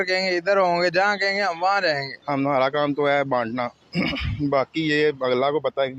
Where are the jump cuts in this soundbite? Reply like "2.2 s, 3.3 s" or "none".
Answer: 2.1 s